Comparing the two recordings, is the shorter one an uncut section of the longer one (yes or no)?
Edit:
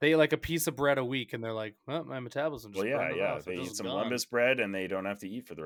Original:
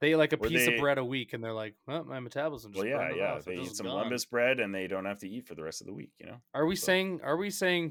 yes